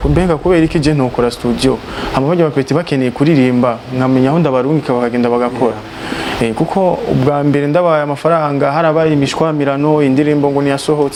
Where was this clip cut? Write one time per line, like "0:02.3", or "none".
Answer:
none